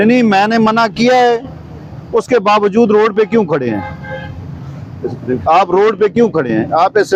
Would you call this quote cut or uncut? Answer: uncut